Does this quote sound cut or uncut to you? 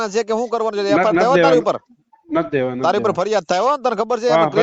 uncut